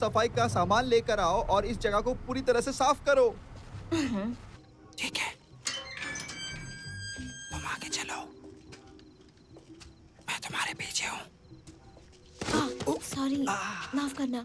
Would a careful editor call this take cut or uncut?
cut